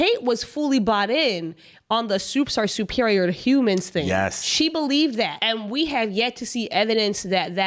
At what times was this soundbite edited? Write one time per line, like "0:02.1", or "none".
0:05.4